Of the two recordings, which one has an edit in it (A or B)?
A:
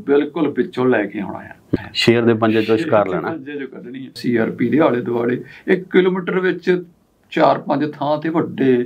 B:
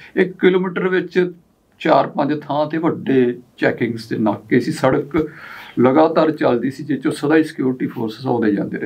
A